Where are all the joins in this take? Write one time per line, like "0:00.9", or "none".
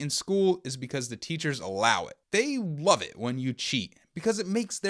0:02.1